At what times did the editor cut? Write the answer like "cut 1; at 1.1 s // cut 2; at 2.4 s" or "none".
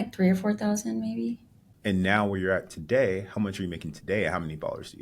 cut 1; at 1.7 s